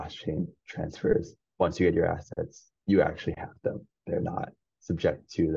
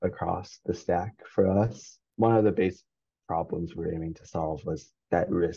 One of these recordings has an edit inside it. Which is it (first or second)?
first